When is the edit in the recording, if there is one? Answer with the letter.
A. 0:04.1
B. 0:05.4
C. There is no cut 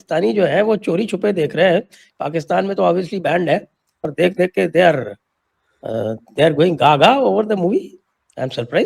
A